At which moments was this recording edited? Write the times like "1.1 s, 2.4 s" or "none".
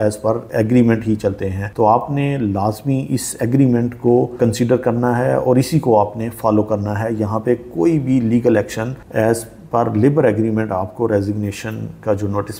8.9 s